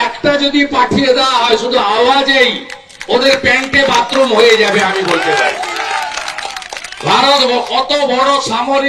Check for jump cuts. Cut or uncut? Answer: uncut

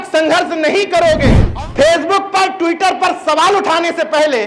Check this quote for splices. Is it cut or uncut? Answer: cut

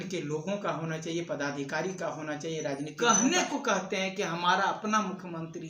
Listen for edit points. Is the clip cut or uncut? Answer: cut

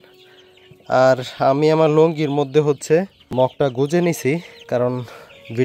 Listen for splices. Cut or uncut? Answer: cut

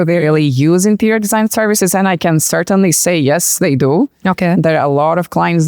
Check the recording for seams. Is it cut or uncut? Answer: uncut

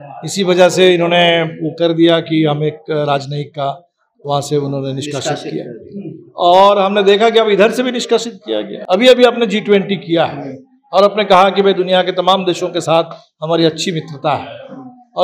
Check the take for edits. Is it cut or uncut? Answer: cut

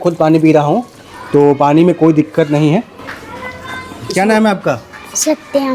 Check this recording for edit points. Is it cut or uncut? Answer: uncut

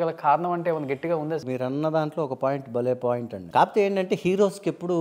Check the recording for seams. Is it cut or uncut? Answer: cut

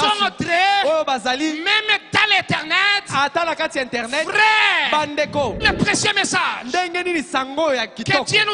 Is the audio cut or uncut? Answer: cut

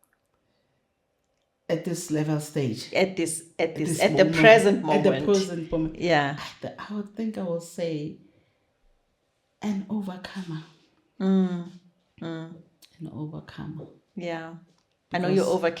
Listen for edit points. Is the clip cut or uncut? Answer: uncut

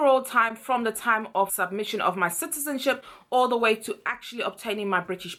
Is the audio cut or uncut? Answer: uncut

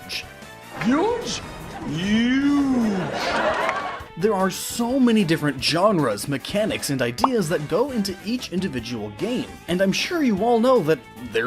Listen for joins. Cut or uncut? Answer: cut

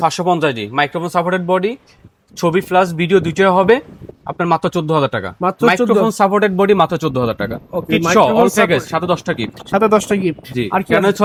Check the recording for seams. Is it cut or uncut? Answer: uncut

